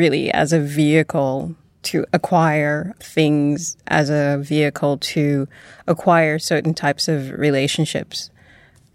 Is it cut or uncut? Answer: uncut